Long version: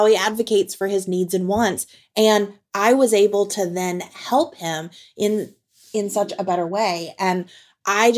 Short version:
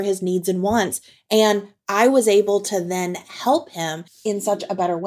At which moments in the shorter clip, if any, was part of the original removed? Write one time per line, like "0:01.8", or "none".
0:04.1